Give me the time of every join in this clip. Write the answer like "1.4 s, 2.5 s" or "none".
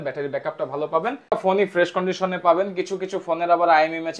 1.3 s